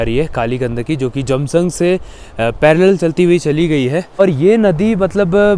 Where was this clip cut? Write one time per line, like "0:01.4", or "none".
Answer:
0:04.1